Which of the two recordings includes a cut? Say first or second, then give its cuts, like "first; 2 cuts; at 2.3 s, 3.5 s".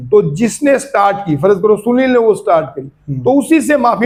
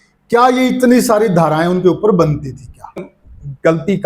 second; 1 cut; at 3.1 s